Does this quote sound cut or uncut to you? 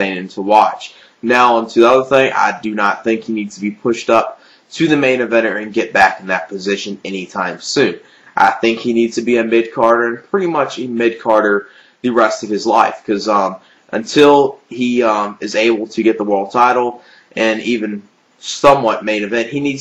cut